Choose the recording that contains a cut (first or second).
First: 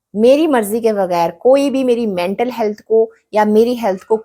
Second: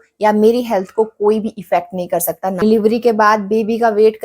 second